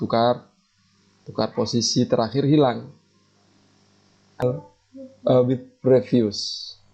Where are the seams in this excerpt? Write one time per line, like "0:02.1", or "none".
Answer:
0:04.4